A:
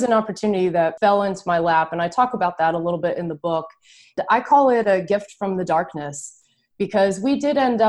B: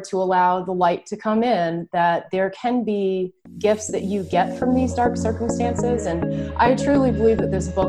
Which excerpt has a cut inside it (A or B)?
A